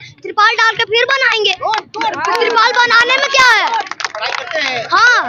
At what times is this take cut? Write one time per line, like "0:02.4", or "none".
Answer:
none